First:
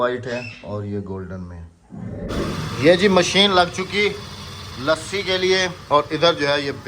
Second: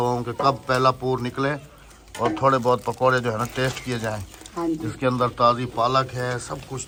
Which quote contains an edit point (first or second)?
first